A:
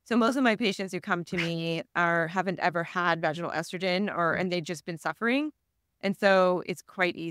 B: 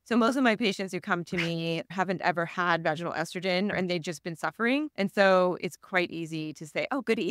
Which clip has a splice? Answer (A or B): B